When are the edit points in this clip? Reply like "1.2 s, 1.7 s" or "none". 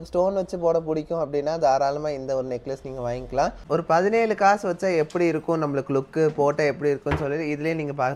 3.7 s